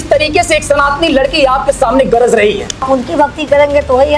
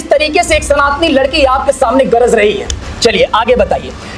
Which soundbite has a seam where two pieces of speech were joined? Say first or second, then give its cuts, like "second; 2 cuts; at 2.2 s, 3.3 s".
first; 1 cut; at 2.8 s